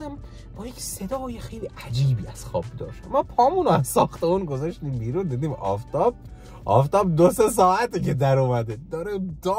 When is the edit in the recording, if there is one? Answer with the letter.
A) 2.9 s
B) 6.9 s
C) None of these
A